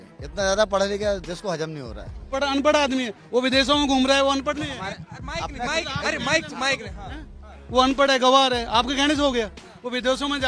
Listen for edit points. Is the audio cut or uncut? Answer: cut